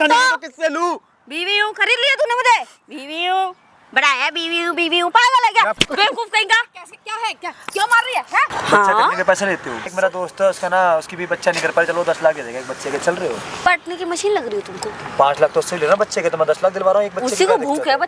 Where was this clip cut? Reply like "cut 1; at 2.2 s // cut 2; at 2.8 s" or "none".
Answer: cut 1; at 8.5 s // cut 2; at 9.9 s // cut 3; at 13.7 s